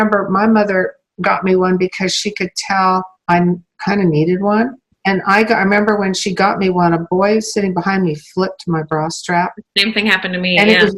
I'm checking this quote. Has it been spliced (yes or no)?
yes